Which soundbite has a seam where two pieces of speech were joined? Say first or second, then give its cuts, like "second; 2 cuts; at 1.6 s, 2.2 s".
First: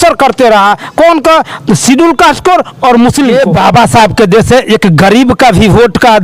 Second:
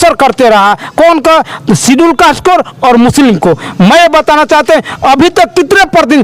first; 1 cut; at 3.3 s